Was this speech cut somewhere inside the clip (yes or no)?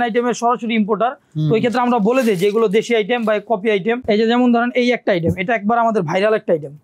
yes